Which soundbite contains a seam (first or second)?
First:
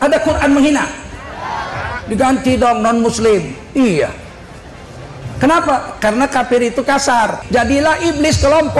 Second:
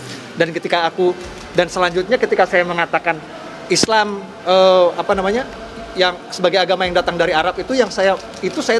first